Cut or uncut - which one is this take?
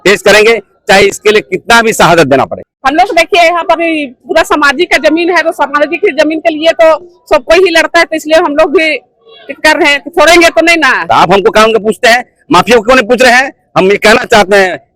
cut